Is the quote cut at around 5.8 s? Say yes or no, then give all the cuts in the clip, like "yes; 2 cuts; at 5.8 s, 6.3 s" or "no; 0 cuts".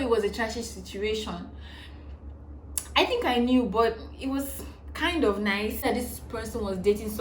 yes; 1 cut; at 5.8 s